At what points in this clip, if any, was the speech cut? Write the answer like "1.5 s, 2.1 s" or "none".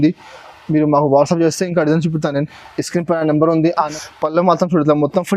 3.9 s